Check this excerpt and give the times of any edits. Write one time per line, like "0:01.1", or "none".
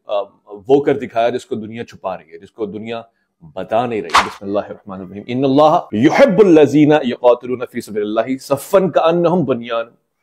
0:04.2